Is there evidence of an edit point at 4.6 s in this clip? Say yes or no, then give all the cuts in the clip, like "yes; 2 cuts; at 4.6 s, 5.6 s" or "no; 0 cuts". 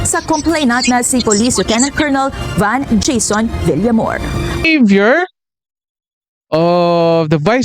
yes; 1 cut; at 4.6 s